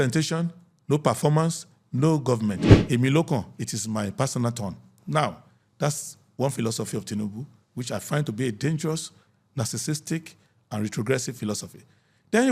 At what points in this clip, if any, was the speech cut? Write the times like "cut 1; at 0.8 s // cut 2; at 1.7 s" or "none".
cut 1; at 2.7 s